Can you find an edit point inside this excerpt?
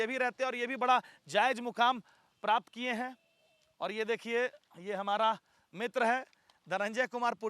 no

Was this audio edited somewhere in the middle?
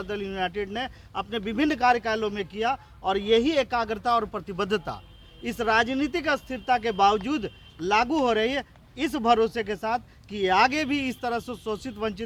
no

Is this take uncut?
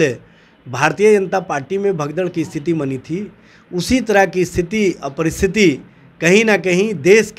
yes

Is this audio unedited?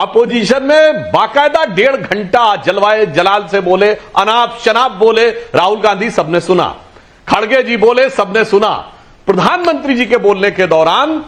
yes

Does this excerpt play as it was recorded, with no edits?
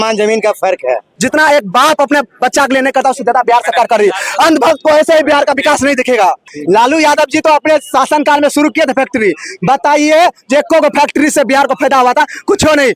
no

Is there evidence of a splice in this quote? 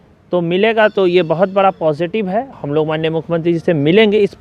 yes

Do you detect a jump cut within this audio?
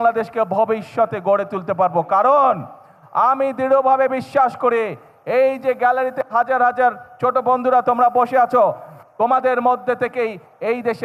no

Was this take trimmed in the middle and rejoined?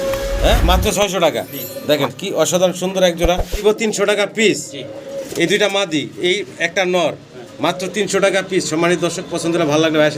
yes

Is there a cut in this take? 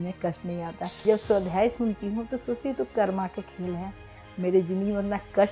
yes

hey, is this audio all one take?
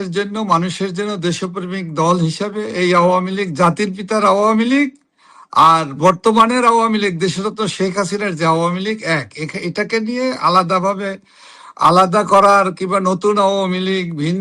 yes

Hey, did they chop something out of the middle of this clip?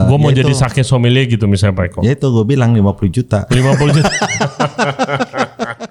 no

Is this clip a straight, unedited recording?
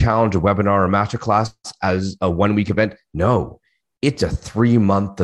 yes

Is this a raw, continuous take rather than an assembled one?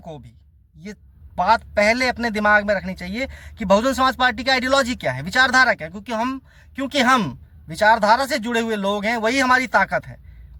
yes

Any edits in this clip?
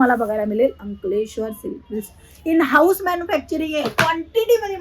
no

